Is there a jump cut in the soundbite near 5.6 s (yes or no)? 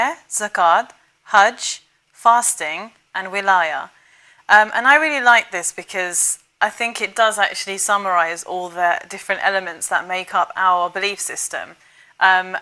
no